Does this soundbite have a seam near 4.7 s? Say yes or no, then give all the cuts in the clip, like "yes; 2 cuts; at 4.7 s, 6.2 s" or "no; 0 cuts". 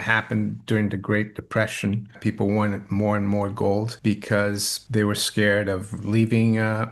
yes; 3 cuts; at 2.2 s, 3.9 s, 4.7 s